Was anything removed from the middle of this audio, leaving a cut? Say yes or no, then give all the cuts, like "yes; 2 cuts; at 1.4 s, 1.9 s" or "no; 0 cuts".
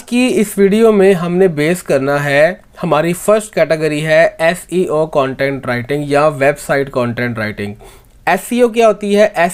no; 0 cuts